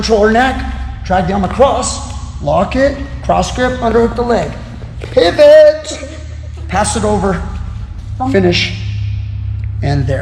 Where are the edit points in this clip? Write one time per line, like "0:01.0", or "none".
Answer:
none